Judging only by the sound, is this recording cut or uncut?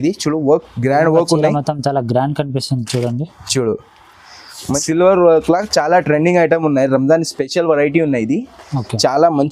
cut